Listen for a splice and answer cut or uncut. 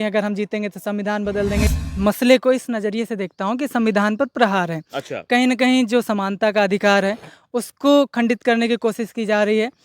cut